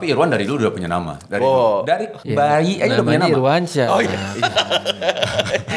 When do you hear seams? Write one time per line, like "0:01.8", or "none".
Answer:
0:02.2